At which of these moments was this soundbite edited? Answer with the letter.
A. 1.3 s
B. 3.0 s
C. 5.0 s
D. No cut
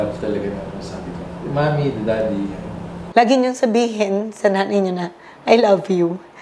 B